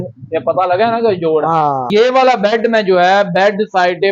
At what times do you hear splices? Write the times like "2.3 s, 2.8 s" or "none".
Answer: 1.9 s